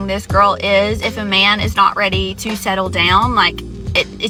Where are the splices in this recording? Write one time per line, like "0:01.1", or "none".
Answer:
none